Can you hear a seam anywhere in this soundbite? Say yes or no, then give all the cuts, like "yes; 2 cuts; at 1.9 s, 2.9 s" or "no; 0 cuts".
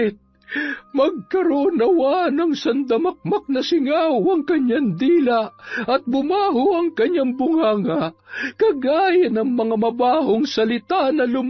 no; 0 cuts